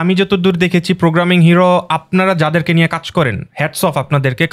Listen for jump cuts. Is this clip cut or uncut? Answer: uncut